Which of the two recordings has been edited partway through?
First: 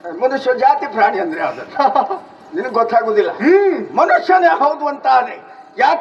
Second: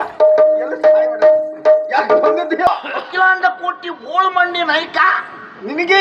second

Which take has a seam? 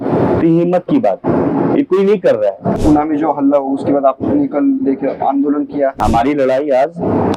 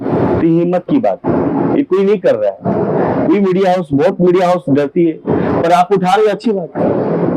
first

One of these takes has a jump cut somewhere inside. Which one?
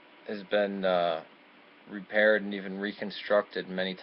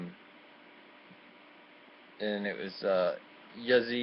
first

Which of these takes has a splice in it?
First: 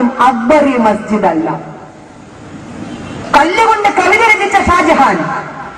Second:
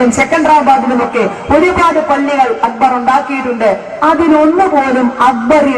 first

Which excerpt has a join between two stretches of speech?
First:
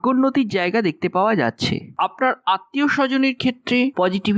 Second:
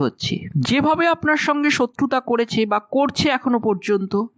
first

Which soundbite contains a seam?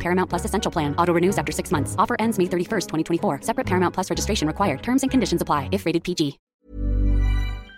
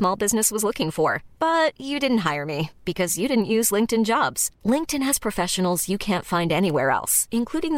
first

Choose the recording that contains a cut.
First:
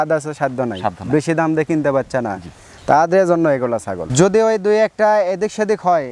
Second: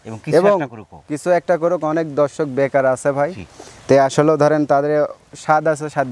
first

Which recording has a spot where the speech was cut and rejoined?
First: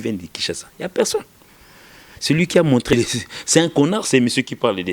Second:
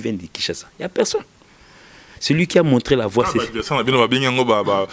first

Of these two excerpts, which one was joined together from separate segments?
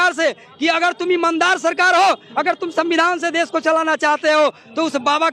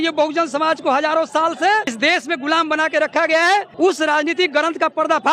second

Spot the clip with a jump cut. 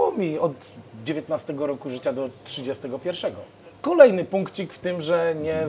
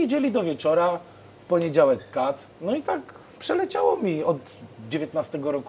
first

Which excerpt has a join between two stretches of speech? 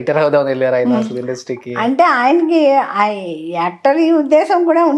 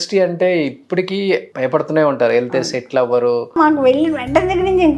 second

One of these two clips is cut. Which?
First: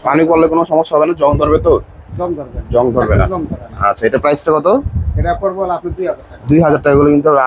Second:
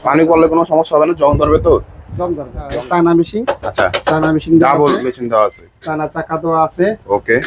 second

